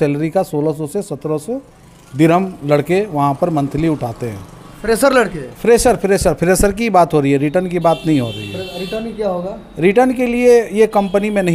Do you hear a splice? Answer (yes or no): no